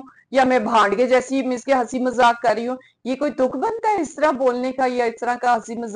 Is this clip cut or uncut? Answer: uncut